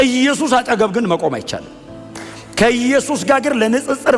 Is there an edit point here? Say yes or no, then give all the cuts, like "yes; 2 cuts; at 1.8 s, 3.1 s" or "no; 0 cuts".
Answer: no; 0 cuts